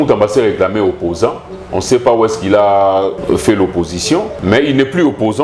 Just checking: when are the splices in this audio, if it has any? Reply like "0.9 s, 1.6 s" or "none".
3.2 s, 4.3 s